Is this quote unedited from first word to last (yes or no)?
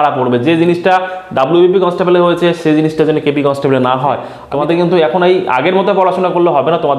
no